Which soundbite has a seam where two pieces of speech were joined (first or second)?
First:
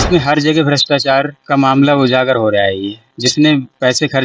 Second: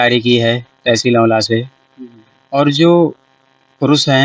first